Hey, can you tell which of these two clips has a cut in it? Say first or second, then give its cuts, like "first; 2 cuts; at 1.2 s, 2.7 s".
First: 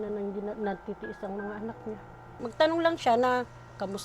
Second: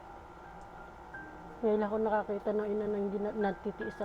first; 1 cut; at 2.4 s